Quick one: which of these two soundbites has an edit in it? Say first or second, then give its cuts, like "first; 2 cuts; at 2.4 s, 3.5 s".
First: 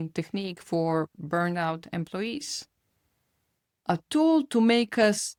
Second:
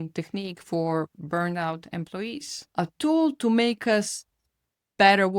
second; 1 cut; at 2.5 s